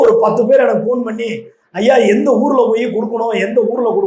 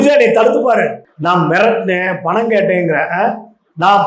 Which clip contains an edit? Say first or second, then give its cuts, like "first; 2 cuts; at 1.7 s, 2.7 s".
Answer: second; 1 cut; at 1.0 s